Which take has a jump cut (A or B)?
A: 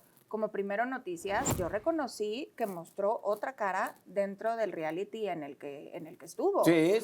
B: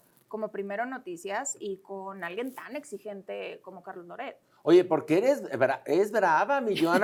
A